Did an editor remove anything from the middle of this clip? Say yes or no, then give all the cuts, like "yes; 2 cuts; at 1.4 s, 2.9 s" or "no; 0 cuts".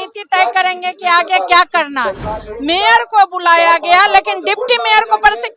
yes; 1 cut; at 2.3 s